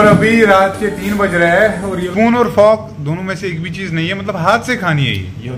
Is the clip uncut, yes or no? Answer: no